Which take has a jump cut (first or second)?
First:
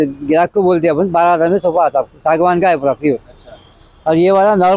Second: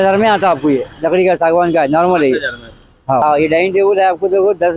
second